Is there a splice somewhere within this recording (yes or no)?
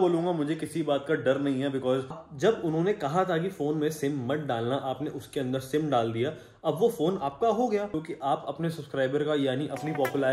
yes